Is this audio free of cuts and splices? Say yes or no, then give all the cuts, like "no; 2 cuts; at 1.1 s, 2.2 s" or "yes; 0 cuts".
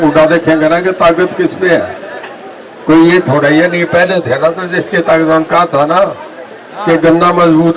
yes; 0 cuts